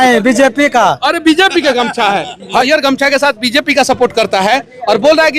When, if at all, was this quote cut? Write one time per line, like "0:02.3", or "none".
0:02.6